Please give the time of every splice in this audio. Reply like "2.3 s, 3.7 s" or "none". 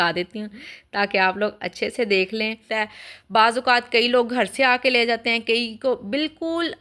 2.7 s